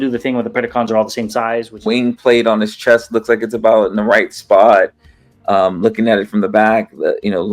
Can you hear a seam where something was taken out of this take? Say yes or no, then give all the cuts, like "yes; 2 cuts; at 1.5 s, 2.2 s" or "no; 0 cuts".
yes; 1 cut; at 1.7 s